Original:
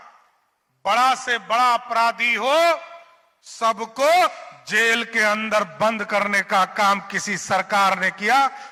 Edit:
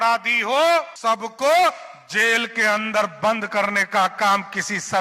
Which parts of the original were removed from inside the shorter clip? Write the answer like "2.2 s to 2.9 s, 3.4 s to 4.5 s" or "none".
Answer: 2.9 s to 3.5 s